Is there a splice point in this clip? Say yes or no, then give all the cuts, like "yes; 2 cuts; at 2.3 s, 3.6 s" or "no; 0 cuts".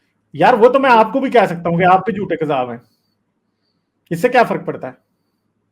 no; 0 cuts